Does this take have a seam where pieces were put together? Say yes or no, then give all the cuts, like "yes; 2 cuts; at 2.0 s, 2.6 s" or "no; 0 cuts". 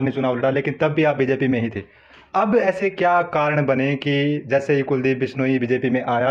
no; 0 cuts